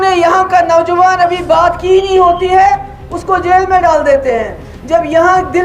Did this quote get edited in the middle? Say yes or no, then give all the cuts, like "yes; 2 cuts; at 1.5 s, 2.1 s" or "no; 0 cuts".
no; 0 cuts